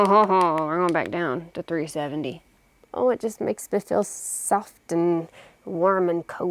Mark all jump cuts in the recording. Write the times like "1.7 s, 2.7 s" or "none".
2.7 s